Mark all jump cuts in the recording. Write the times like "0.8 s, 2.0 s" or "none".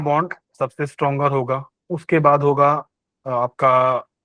1.7 s